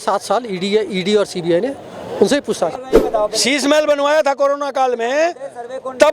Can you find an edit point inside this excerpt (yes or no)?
yes